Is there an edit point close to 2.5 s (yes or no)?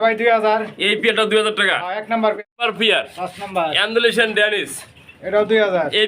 yes